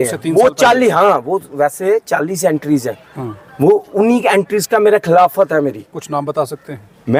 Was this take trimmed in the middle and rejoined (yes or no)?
no